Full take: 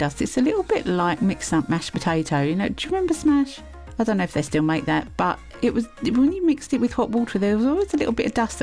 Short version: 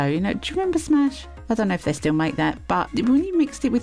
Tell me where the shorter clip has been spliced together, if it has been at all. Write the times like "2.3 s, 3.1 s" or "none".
1.3 s, 2.9 s

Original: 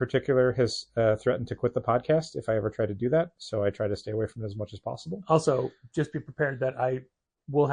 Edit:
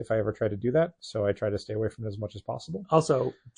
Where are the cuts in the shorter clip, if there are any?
none

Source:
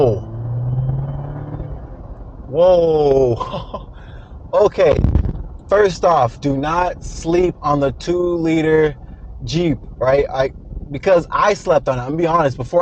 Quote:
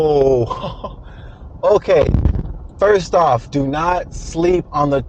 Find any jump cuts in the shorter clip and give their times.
none

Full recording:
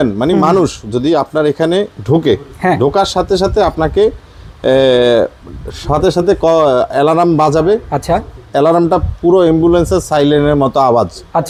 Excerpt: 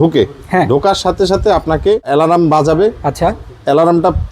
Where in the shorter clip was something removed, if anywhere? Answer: 2.1 s

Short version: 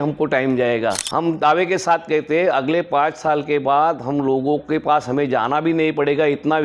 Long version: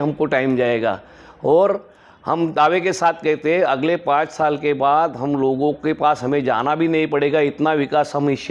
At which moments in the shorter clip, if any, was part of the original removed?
1.0 s

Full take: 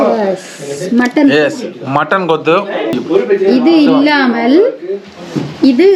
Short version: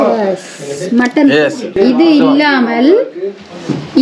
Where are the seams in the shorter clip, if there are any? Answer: 1.7 s

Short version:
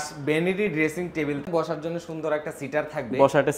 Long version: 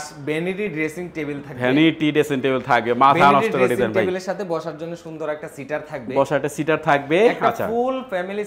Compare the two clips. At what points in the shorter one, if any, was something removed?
1.5 s

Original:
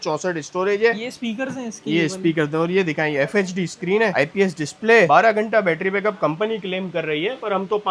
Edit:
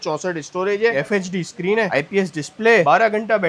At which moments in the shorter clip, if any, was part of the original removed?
0.9 s

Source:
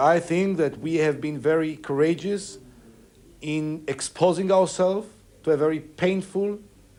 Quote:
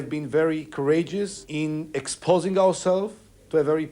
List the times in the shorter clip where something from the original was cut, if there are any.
1.4 s

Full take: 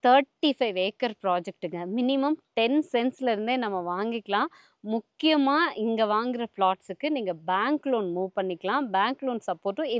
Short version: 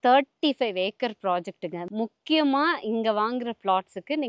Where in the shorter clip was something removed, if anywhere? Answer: 1.8 s

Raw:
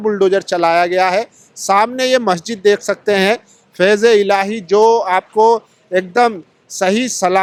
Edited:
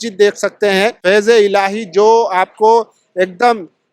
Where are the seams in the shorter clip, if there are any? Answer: 1.0 s

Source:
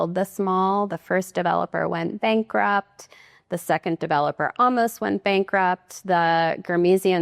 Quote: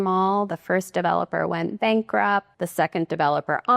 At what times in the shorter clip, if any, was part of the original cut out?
2.6 s

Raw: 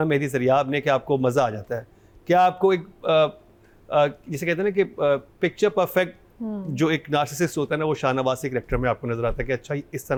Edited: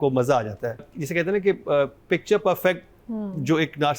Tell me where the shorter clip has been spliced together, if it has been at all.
1.0 s

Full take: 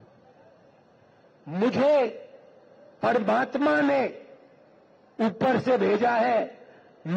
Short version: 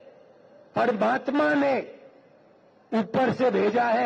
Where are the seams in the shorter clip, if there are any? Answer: none

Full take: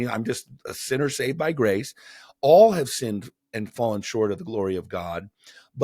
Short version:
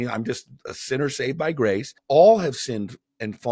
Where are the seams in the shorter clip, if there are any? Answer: 1.9 s

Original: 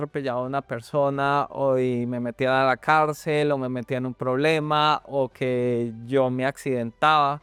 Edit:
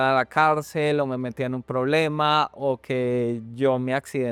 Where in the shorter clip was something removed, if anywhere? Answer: none

